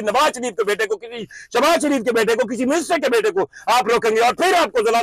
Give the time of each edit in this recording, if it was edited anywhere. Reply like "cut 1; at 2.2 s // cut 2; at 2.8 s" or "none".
none